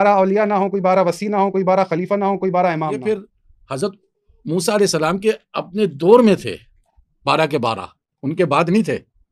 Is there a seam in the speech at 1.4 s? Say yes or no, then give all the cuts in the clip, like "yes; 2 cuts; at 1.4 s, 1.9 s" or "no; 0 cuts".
no; 1 cut; at 3.0 s